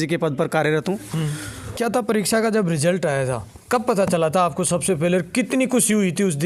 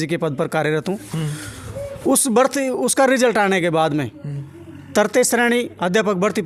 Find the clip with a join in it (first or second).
first